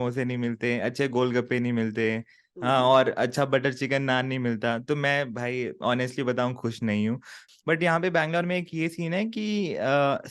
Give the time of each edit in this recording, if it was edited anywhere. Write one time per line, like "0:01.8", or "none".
0:07.5